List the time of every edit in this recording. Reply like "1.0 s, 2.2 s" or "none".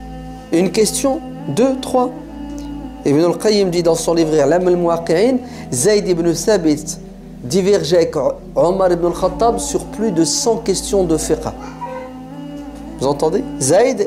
none